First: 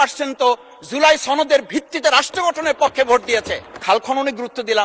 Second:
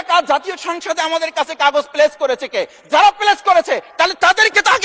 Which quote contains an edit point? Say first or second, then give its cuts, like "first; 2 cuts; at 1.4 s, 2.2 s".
first; 1 cut; at 3.8 s